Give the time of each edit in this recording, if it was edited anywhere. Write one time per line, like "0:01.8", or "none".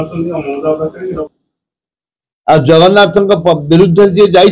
0:01.0